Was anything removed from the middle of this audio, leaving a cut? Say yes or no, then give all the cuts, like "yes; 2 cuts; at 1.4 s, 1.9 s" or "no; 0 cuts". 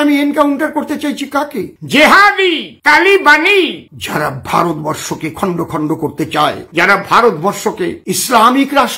no; 0 cuts